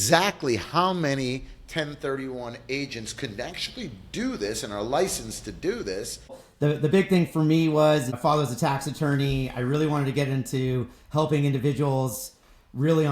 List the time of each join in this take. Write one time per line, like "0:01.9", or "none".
0:06.4
0:08.2